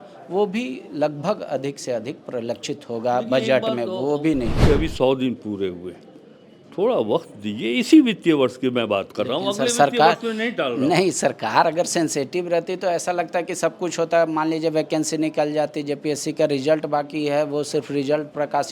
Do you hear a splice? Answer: yes; 1 cut; at 4.6 s

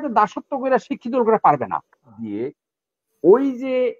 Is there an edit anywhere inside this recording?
yes; 1 cut; at 2.1 s

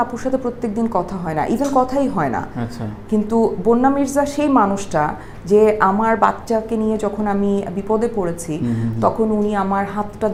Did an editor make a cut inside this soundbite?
no; 0 cuts

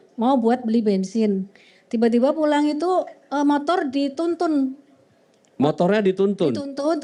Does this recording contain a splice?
no; 0 cuts

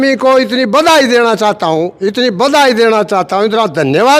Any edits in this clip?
no; 0 cuts

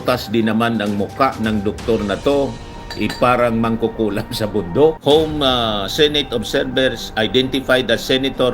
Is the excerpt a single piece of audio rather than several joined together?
no; 1 cut; at 5.0 s

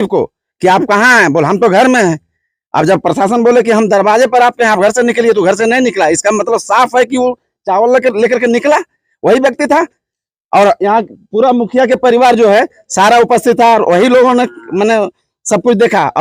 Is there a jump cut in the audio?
no; 0 cuts

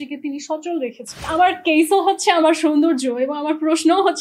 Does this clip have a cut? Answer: yes; 1 cut; at 1.1 s

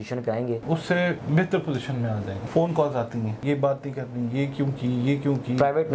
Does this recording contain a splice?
yes; 3 cuts; at 1.0 s, 2.4 s, 3.4 s

